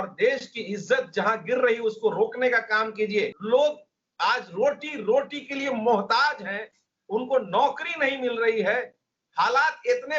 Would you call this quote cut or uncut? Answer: cut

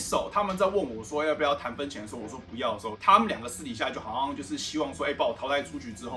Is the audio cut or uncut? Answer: cut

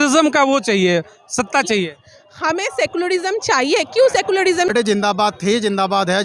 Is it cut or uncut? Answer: cut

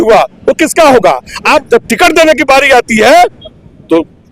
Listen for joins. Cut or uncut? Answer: cut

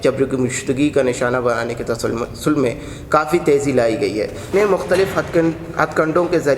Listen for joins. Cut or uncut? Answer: cut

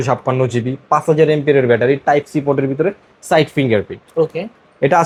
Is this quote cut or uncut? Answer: uncut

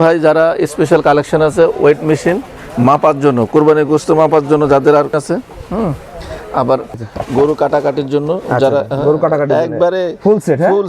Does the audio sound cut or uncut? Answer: cut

